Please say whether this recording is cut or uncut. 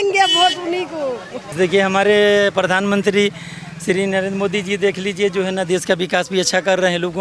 cut